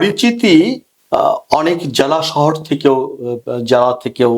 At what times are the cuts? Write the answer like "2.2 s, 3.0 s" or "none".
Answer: 0.9 s